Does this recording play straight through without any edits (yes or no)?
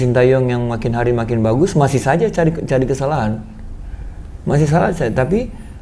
yes